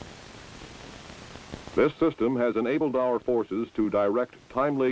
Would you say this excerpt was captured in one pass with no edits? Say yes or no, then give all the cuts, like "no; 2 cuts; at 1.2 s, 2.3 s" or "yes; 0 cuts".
no; 1 cut; at 3.3 s